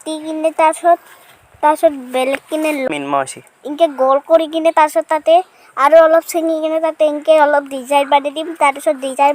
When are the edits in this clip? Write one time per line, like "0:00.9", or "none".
0:02.9